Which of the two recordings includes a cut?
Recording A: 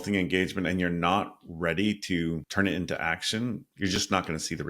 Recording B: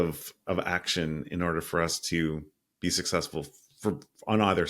A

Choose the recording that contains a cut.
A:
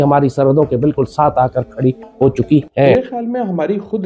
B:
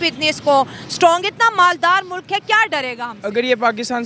A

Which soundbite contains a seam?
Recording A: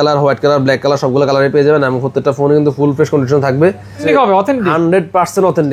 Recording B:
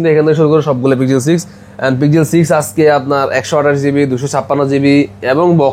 A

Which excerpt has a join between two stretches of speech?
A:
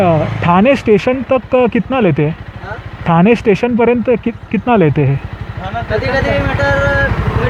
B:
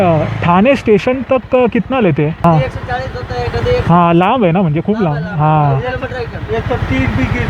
B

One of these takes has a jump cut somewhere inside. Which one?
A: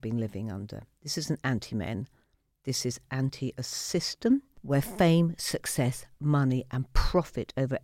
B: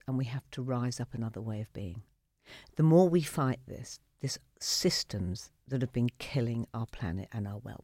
A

